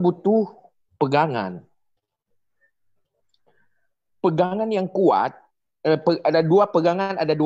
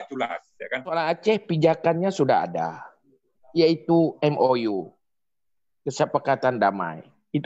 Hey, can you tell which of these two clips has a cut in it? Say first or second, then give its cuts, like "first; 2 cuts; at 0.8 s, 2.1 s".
second; 1 cut; at 0.9 s